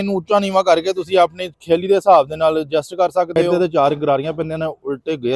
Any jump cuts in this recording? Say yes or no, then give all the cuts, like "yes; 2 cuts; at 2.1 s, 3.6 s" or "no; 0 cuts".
yes; 1 cut; at 3.4 s